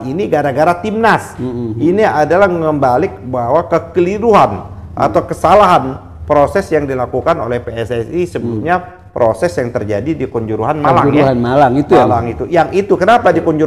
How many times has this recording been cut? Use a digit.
0